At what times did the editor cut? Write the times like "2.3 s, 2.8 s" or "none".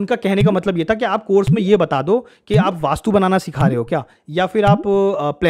none